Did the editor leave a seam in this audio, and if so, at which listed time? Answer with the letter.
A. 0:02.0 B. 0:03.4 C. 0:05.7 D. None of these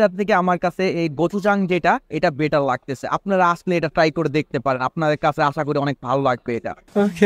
D